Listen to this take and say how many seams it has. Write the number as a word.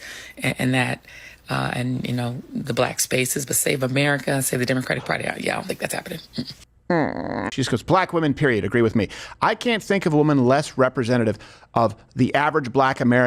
one